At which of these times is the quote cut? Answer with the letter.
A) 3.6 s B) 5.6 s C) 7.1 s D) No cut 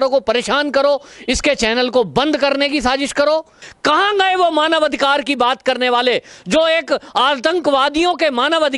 A